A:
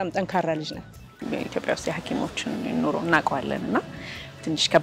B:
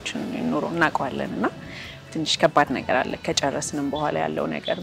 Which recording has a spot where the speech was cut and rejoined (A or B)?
A